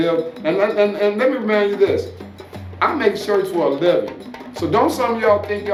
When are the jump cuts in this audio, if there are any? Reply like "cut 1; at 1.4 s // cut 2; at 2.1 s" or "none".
none